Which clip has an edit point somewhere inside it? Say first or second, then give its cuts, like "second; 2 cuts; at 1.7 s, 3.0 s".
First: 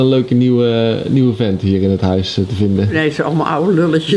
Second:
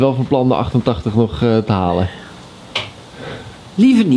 first; 1 cut; at 3.0 s